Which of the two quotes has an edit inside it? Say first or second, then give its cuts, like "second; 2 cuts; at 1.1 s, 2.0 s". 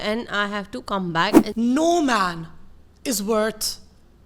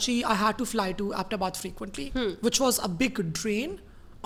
first; 1 cut; at 1.5 s